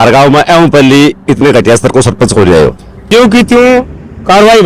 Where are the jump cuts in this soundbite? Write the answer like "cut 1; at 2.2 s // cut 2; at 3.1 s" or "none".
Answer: cut 1; at 3.1 s